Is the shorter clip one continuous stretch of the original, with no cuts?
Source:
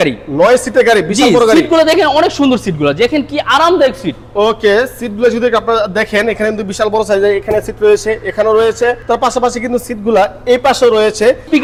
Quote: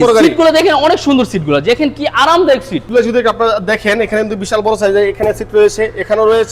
no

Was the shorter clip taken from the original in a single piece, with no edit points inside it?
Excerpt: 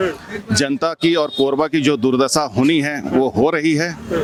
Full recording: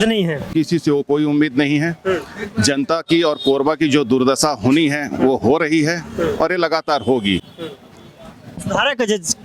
yes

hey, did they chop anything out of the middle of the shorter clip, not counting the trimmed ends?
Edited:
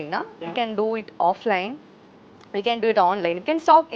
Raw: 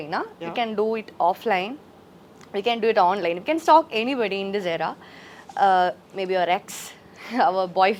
no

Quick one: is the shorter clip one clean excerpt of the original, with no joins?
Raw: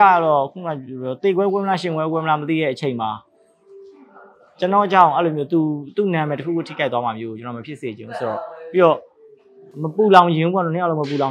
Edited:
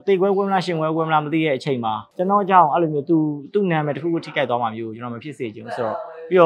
no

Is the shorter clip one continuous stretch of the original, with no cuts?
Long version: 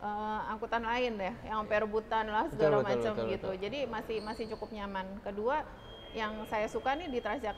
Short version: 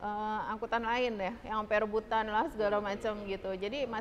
yes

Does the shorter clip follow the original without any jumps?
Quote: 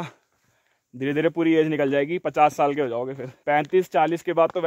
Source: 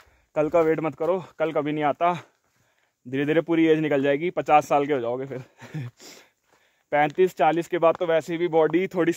no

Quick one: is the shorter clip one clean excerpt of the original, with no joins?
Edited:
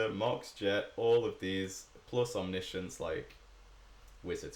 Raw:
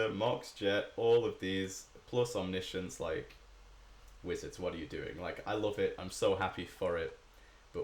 yes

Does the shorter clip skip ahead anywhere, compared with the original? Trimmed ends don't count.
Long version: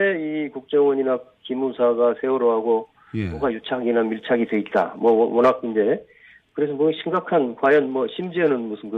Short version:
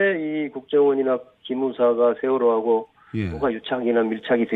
no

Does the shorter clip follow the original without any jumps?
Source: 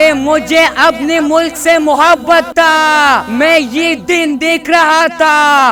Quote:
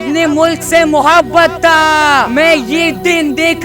no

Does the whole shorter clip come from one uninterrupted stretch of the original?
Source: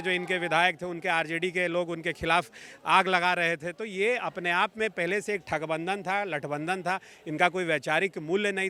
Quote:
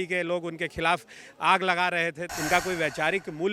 no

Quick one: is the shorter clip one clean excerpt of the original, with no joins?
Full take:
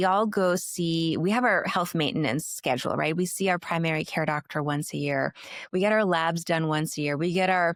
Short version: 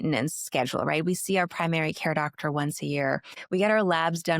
no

